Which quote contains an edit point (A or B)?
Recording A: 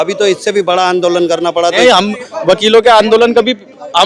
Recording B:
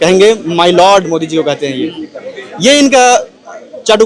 A